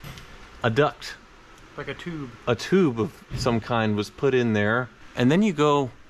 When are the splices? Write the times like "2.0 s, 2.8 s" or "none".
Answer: 5.0 s